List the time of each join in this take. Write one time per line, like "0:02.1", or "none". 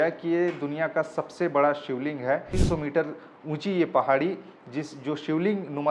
0:02.5